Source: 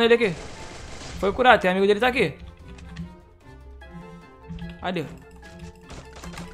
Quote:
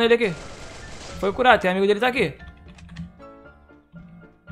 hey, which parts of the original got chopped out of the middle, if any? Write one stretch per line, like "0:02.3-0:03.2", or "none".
none